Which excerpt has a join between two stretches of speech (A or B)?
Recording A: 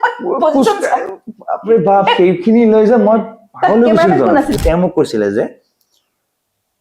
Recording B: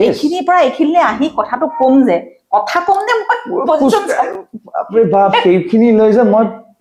A